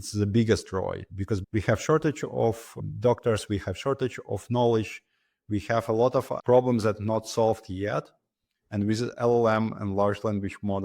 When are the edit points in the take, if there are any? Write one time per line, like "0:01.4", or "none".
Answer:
0:01.4
0:06.3